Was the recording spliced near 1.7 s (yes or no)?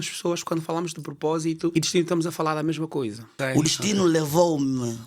yes